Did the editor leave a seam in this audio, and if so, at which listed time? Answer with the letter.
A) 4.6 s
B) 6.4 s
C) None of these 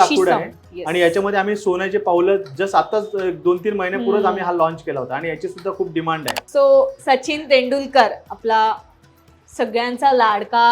B